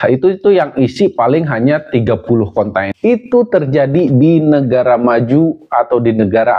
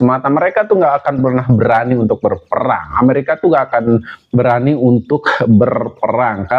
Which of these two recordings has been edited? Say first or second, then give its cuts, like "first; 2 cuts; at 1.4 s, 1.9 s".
first; 1 cut; at 2.9 s